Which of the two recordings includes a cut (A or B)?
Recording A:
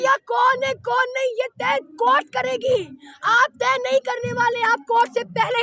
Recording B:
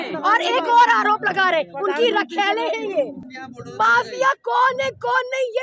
B